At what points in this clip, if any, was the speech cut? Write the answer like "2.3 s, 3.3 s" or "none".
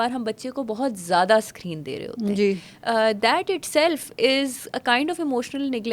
none